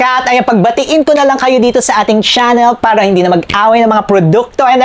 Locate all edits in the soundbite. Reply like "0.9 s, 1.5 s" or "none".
none